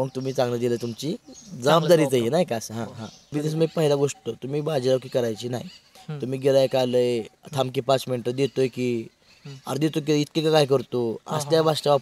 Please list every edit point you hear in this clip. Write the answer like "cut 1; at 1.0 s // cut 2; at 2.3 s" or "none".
cut 1; at 3.3 s